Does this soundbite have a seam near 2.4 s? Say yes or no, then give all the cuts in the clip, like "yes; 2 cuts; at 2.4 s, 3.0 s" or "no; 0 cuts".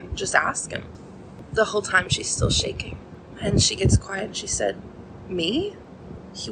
no; 1 cut; at 1.0 s